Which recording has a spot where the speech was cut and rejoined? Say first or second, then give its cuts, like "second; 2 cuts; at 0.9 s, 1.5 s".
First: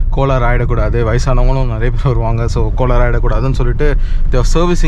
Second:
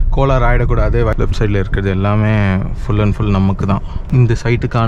second; 2 cuts; at 1.1 s, 3.9 s